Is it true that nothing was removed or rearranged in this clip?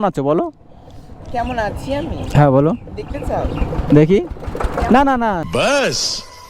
no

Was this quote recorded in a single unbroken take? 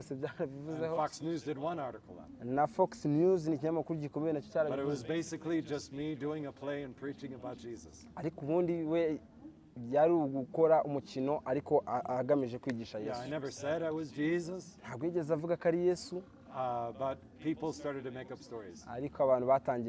yes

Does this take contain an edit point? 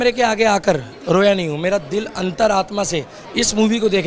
no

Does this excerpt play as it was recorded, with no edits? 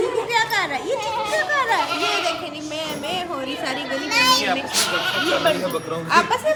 yes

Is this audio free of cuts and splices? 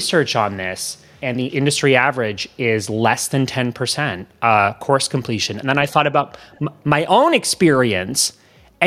no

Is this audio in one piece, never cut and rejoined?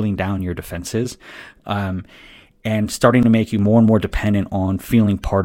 yes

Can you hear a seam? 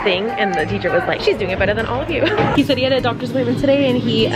yes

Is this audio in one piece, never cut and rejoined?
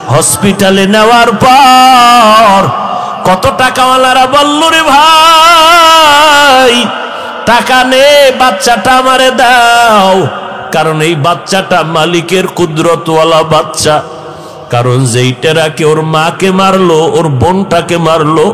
yes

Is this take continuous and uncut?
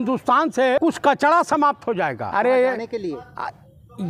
no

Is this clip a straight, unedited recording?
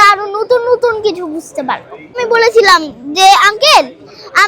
no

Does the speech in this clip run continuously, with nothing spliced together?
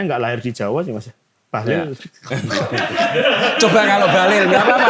yes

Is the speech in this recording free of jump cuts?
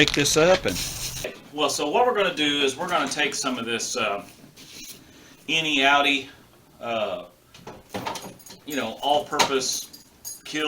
no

